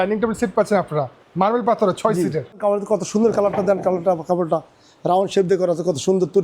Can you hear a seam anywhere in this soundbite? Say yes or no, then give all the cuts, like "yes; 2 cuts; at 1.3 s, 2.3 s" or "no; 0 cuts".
yes; 1 cut; at 2.6 s